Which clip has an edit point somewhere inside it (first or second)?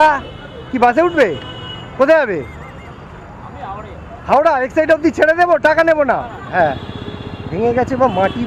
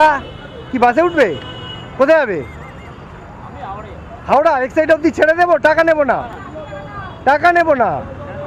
first